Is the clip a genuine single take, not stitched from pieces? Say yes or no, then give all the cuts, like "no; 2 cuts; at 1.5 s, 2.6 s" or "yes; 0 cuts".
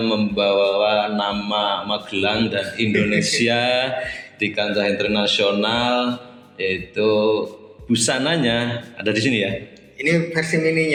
yes; 0 cuts